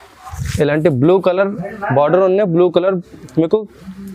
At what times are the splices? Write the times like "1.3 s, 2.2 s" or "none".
none